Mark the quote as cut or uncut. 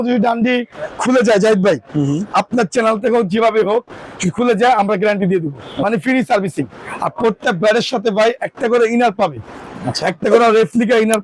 uncut